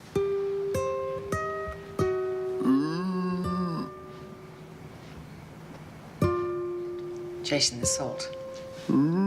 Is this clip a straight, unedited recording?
no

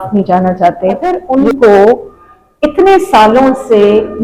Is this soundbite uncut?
no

